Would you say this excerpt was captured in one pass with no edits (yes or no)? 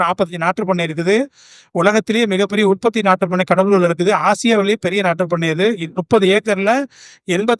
yes